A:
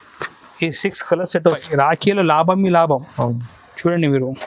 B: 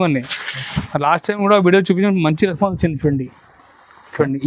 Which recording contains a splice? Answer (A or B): A